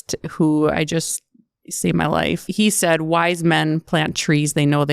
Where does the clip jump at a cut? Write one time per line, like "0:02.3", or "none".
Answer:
0:02.5